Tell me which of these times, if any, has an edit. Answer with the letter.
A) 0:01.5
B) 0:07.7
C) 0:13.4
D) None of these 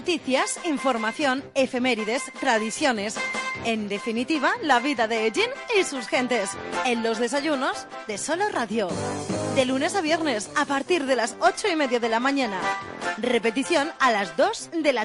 D